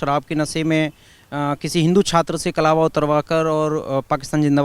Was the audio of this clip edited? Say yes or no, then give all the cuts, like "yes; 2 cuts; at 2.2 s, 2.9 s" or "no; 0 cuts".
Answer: no; 0 cuts